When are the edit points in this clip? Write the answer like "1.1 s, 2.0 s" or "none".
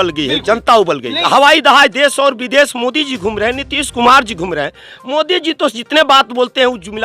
1.1 s